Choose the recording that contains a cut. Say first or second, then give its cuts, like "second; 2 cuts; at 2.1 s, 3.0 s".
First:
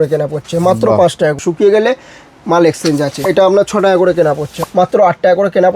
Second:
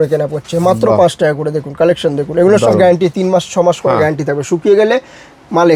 first; 3 cuts; at 1.4 s, 3.2 s, 4.6 s